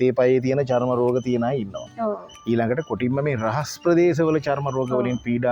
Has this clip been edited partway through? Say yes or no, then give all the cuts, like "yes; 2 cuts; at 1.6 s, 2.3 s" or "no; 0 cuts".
no; 0 cuts